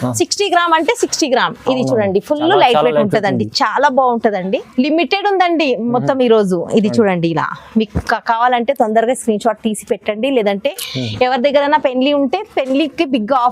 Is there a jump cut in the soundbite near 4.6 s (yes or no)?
yes